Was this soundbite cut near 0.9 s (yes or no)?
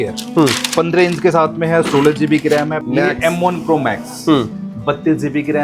no